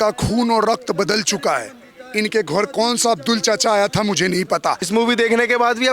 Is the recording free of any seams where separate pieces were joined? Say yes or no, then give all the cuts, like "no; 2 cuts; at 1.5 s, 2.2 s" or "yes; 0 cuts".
no; 1 cut; at 4.8 s